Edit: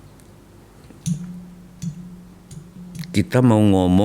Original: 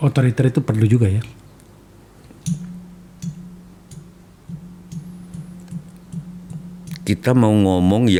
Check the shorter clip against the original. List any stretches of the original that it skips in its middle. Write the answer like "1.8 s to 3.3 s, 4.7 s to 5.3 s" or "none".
4.2 s to 6.7 s